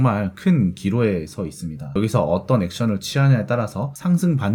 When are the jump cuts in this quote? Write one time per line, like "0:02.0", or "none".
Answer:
none